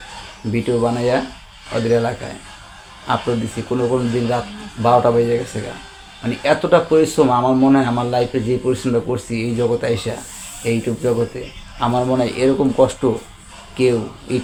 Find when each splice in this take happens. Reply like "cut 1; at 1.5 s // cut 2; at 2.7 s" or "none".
none